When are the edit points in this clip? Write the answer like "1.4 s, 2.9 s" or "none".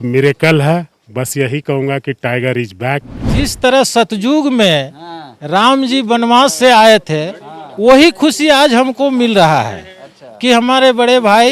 3.2 s

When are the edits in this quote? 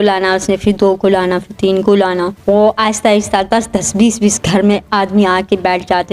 2.3 s

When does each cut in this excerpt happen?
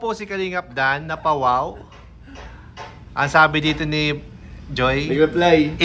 none

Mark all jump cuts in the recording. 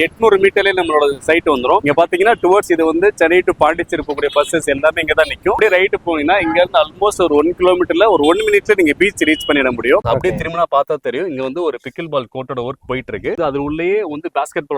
1.8 s, 5.6 s, 10.0 s, 13.4 s

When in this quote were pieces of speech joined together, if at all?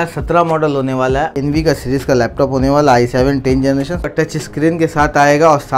1.3 s, 4.1 s

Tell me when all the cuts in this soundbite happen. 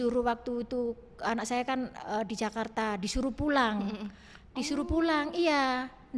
none

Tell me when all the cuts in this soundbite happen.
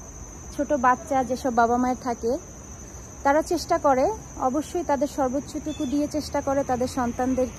none

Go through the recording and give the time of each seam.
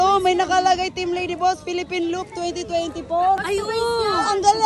3.4 s

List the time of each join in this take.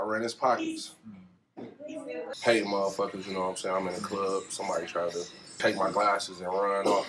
2.3 s, 5.6 s

